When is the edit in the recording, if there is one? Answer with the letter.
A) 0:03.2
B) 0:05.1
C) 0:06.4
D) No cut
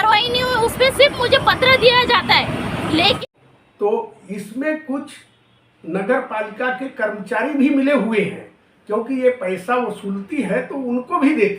A